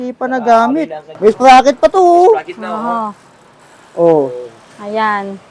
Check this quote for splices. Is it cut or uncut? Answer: cut